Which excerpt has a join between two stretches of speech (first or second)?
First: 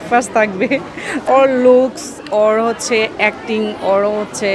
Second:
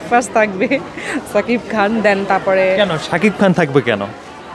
first